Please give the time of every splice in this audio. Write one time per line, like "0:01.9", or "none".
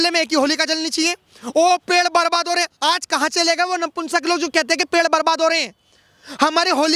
none